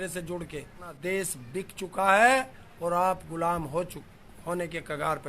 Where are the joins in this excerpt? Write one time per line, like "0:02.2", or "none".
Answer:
0:01.0